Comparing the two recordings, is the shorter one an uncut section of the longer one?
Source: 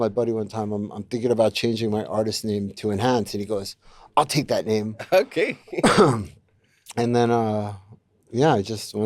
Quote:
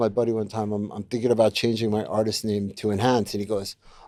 yes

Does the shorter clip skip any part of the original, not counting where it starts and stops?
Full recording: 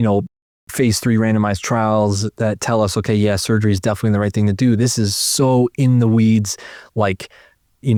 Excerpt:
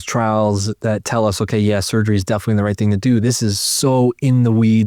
no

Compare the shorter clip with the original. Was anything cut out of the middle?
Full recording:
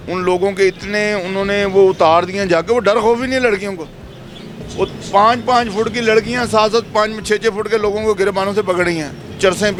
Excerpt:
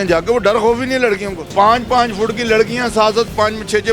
yes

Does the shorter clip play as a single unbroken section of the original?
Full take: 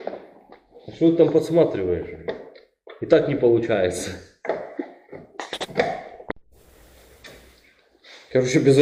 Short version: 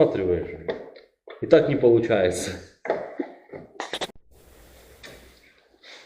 no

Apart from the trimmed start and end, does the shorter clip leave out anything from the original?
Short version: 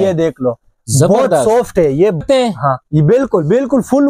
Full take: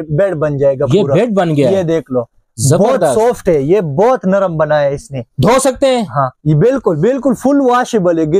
yes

